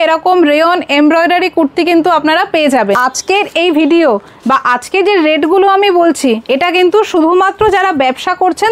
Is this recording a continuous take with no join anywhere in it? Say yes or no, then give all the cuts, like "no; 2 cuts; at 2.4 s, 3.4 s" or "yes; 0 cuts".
no; 1 cut; at 3.0 s